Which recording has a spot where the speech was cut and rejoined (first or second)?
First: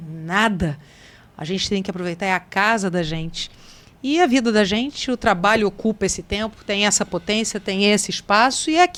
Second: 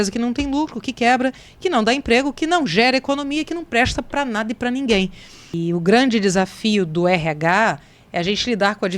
second